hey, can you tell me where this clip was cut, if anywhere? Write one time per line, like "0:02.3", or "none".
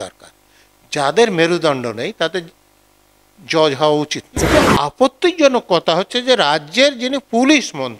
0:04.5